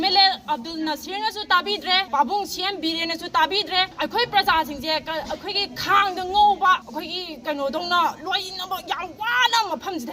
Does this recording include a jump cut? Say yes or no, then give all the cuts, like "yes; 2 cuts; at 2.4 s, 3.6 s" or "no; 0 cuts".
yes; 3 cuts; at 2.1 s, 3.9 s, 6.9 s